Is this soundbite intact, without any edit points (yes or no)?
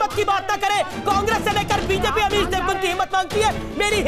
yes